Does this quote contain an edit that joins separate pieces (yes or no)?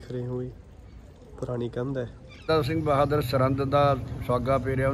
yes